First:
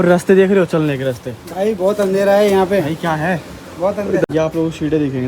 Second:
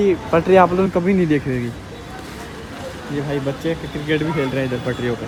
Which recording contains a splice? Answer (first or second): first